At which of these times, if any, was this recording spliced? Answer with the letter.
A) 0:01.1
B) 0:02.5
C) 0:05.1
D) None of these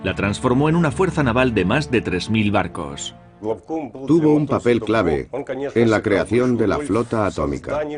A